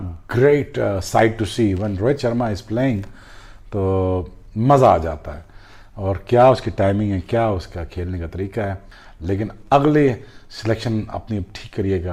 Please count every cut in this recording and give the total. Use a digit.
0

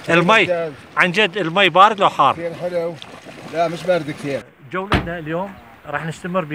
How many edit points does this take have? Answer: 1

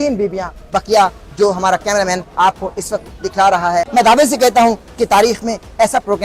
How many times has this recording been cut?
1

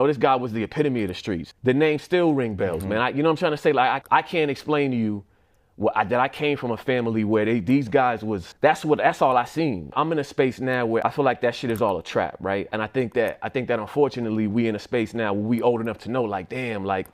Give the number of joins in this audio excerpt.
0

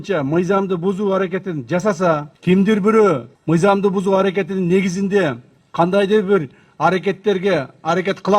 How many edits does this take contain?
2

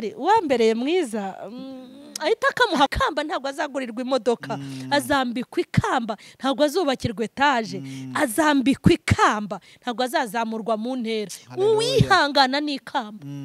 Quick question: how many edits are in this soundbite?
1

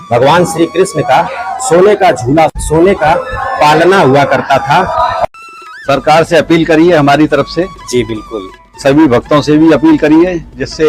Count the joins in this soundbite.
2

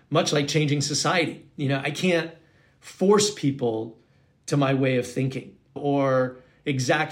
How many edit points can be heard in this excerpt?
1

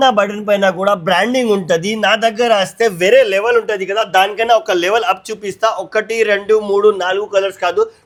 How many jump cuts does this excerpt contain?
0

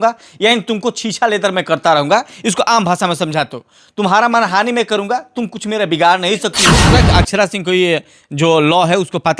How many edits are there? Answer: 1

